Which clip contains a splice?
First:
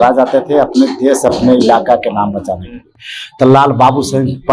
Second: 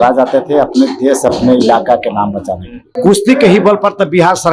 second; 1 cut; at 3.0 s

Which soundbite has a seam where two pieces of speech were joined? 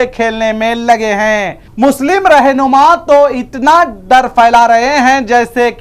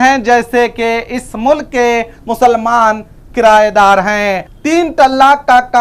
second; 1 cut; at 4.4 s

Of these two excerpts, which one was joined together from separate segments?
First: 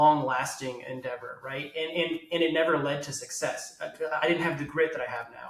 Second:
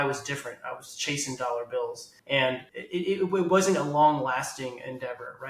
second; 2 cuts; at 2.1 s, 2.7 s

